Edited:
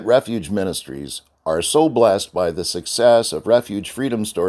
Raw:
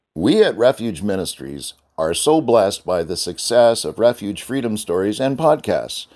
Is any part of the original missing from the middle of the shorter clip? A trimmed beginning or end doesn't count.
no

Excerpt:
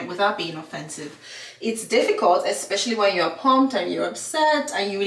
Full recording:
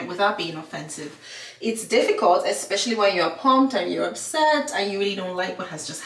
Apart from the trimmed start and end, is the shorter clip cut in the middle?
no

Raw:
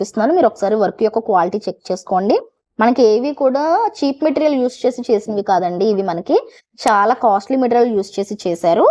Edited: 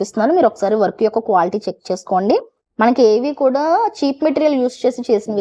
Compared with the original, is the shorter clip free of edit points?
yes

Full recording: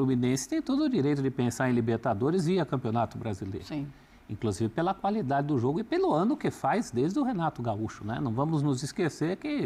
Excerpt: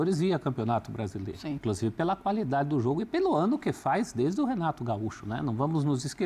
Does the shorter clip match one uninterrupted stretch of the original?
no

